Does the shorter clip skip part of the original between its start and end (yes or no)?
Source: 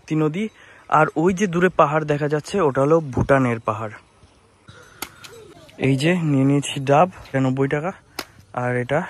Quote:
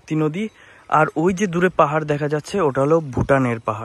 no